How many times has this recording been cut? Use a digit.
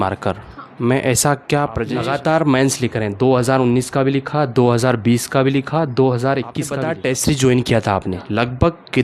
2